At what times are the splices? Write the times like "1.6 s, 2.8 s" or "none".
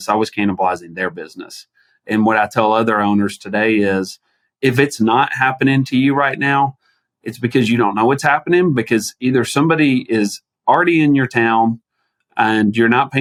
none